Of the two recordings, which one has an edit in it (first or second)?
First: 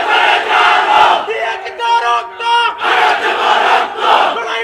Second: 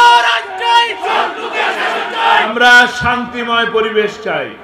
second